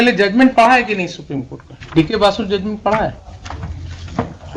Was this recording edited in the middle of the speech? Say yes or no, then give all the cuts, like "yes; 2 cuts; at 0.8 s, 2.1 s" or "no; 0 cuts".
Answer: no; 0 cuts